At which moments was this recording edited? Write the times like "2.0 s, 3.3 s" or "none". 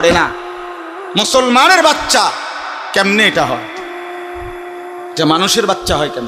3.6 s, 5.1 s

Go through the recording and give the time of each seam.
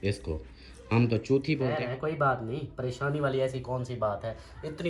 1.7 s

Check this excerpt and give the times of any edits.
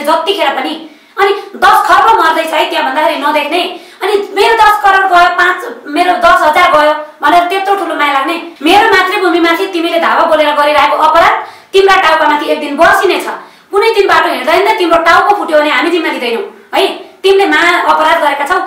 8.5 s

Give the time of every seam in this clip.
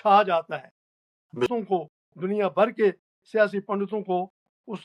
1.5 s

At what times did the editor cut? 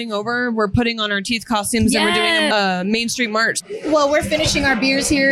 2.5 s, 3.5 s

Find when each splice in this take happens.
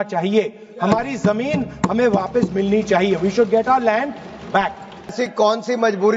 5.1 s

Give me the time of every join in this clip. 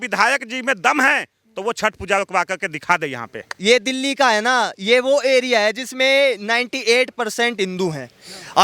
3.5 s

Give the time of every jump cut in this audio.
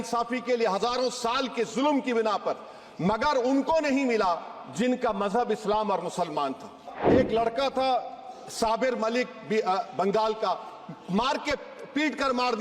6.9 s

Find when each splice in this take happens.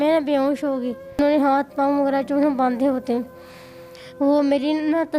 1.2 s, 4.0 s

